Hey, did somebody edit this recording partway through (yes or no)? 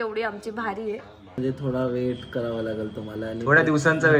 yes